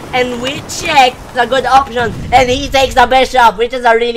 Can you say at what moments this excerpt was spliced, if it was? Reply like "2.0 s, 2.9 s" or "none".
1.3 s